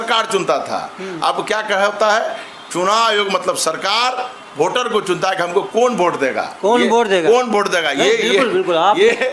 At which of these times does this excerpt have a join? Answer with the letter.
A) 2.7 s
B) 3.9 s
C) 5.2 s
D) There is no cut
D